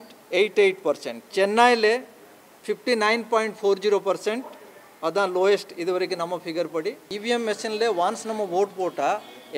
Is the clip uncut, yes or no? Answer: no